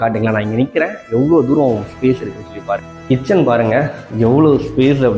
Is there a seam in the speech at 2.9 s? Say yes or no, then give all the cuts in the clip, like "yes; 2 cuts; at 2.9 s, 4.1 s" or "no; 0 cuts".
yes; 1 cut; at 2.9 s